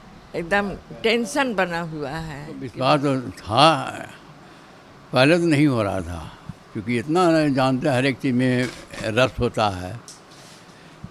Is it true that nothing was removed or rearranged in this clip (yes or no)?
no